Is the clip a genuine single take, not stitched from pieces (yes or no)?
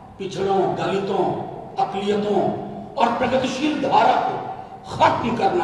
yes